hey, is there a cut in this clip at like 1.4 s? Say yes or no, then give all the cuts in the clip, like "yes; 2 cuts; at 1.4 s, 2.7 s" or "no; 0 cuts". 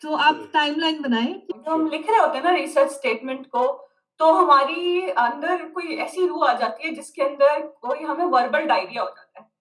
yes; 1 cut; at 1.4 s